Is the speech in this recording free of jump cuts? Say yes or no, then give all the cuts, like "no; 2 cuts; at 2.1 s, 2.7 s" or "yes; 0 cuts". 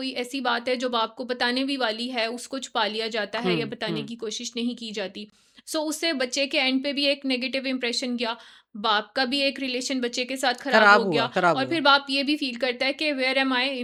yes; 0 cuts